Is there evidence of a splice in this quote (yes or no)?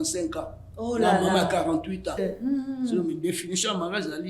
yes